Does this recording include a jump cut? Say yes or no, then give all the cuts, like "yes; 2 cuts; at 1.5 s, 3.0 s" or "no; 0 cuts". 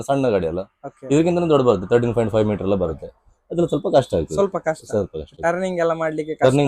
no; 0 cuts